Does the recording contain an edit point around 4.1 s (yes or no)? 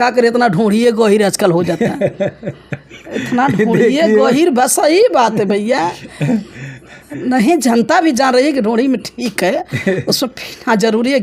no